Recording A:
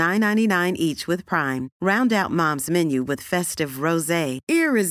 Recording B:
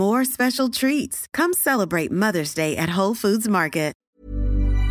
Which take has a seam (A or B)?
B